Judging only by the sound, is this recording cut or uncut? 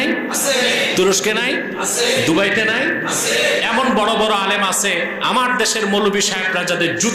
uncut